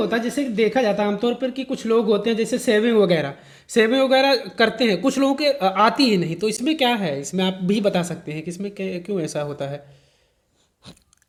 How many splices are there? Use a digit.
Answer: 0